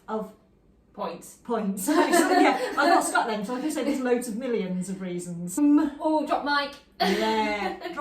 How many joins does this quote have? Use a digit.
1